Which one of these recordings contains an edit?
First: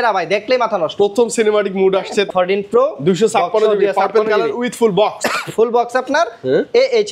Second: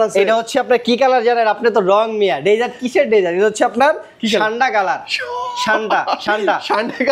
first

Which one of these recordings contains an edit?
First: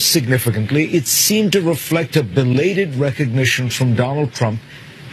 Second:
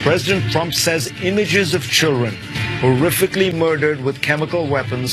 second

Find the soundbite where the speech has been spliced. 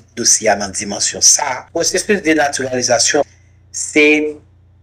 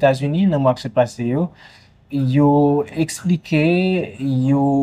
first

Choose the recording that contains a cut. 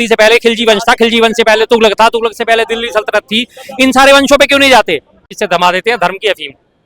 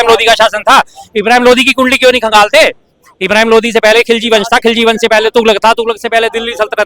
first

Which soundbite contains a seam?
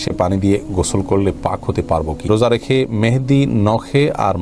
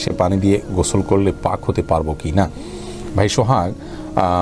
first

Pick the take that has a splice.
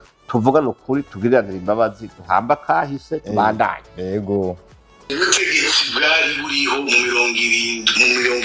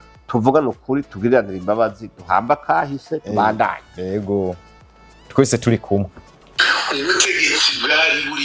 first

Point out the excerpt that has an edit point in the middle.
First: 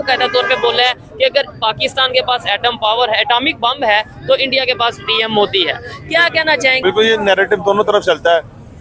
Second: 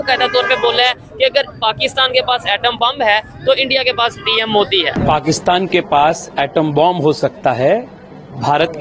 second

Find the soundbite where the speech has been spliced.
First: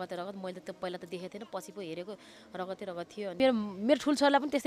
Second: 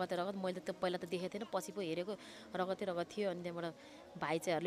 first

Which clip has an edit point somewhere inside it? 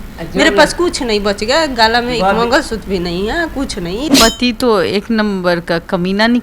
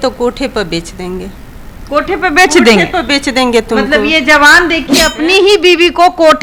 first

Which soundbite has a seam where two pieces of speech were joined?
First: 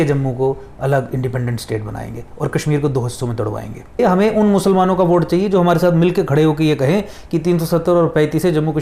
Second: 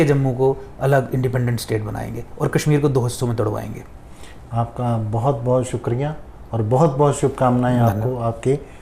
first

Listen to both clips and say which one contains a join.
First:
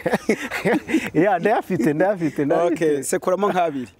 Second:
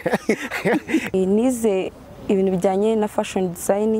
second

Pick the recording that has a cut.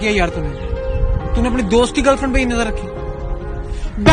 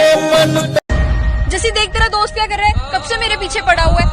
second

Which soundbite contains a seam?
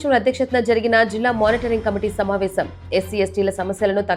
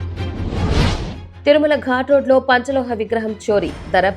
second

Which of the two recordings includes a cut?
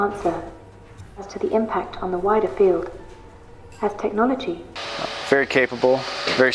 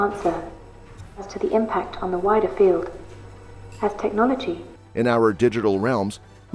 first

